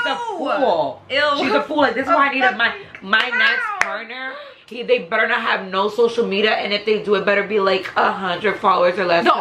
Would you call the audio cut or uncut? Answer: uncut